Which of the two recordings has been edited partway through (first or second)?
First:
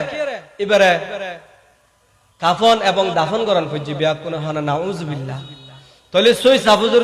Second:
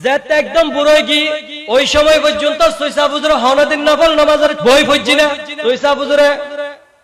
second